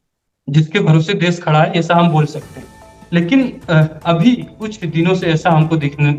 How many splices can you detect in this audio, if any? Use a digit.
0